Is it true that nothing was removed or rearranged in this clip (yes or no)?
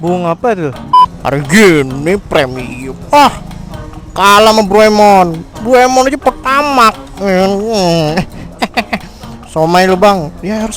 no